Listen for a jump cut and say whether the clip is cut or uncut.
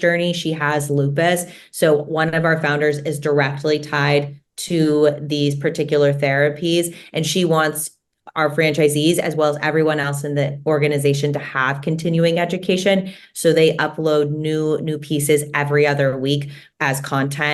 uncut